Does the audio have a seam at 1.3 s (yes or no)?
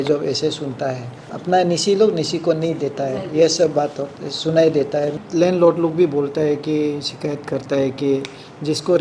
yes